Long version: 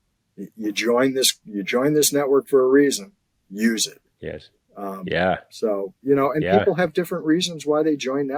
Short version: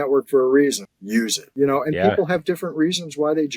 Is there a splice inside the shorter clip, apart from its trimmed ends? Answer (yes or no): yes